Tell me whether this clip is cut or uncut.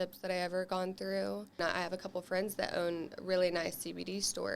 cut